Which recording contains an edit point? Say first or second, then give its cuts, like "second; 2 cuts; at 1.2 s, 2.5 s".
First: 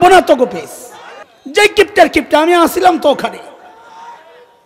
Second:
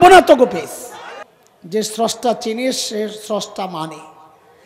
second; 1 cut; at 1.3 s